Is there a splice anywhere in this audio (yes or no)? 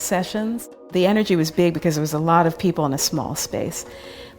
yes